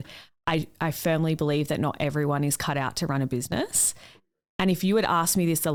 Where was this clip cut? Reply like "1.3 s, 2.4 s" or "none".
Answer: none